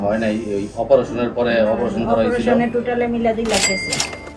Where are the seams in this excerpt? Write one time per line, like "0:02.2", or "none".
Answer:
none